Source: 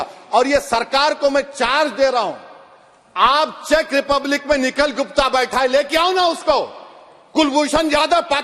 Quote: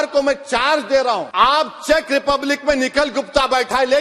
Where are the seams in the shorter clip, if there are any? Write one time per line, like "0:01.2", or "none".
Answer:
0:01.3